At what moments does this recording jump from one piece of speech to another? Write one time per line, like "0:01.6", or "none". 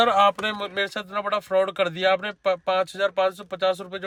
none

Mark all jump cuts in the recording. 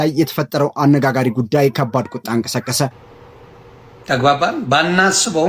0:03.0

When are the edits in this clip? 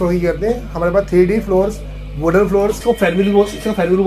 0:02.8

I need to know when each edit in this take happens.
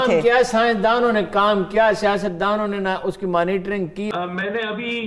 0:04.1

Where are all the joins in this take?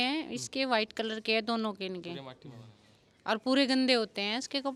none

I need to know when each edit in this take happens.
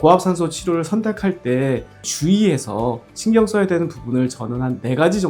0:02.1

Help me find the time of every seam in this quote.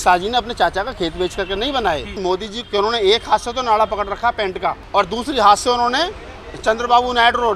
0:02.4
0:04.8

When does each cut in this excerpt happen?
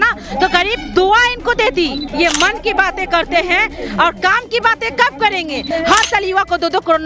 0:02.0
0:05.6

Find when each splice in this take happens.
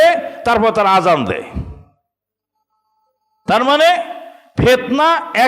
none

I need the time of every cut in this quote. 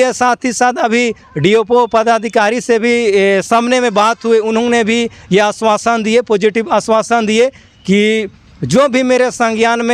none

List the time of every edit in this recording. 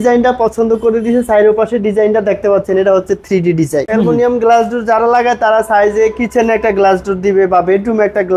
0:03.9

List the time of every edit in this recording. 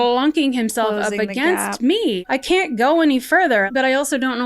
0:02.2
0:03.7

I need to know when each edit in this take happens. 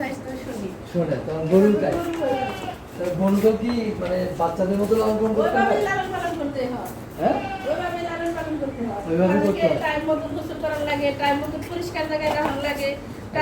none

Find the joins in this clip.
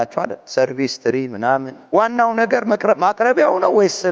0:01.8

